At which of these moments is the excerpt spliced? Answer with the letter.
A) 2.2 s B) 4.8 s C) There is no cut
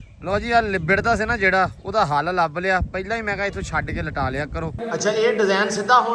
B